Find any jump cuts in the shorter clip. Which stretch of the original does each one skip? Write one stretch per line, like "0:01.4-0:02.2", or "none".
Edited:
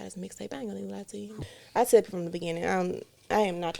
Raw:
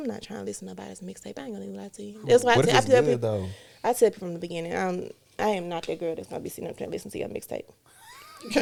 0:02.2-0:03.4

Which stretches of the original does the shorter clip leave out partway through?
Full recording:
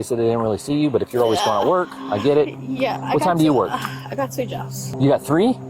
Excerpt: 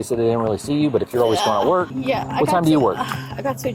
0:01.9-0:02.7

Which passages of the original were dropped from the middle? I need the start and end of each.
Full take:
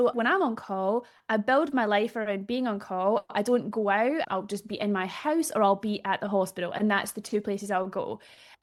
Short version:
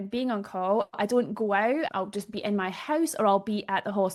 none

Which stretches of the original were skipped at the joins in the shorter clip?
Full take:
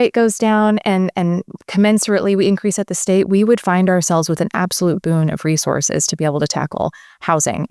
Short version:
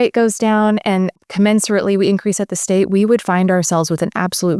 0:01.1-0:01.5

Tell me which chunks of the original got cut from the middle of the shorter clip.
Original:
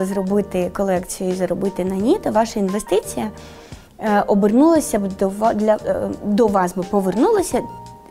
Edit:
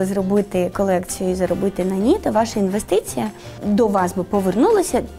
0:03.5-0:06.1

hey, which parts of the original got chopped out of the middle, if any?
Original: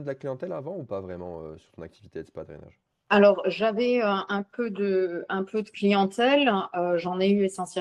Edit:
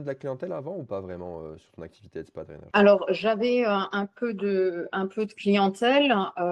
0:02.6-0:03.0

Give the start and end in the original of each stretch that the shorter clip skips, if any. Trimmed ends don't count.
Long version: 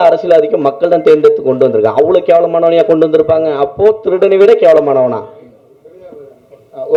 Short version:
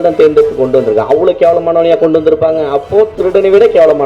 none

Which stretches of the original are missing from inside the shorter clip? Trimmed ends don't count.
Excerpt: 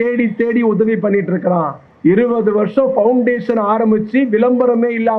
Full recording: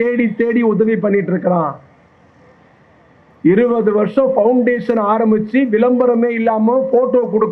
0:01.8-0:03.2

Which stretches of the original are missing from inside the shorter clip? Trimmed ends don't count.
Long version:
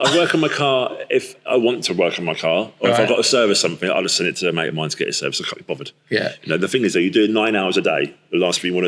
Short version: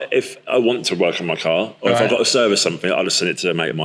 none

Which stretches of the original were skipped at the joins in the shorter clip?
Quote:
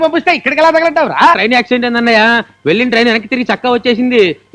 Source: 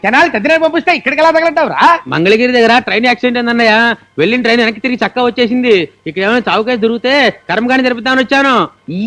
0:02.0-0:02.9

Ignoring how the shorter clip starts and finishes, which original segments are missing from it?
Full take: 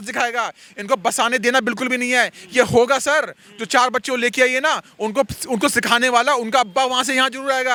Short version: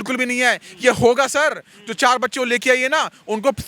none

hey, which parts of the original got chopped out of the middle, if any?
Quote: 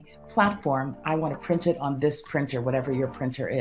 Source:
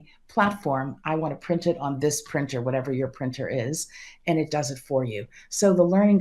none

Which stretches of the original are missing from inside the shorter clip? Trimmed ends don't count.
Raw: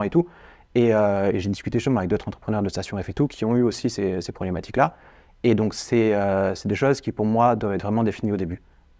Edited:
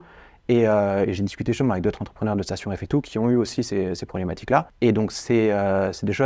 0:05.0-0:05.3

